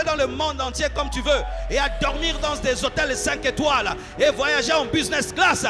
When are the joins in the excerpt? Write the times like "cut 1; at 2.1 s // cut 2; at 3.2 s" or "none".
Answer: none